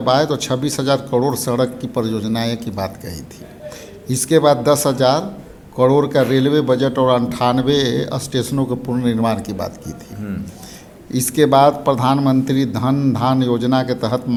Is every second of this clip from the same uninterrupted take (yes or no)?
yes